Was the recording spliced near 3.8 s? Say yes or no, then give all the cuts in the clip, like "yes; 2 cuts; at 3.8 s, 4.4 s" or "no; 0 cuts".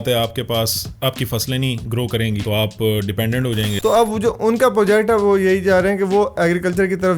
yes; 2 cuts; at 2.4 s, 3.8 s